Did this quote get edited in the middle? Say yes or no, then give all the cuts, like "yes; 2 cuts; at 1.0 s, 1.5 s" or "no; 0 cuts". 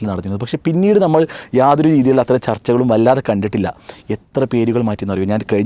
no; 0 cuts